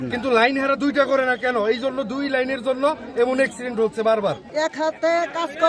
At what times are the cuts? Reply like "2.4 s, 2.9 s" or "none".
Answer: 4.5 s

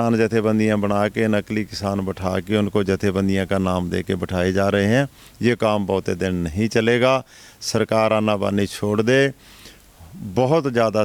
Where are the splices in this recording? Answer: none

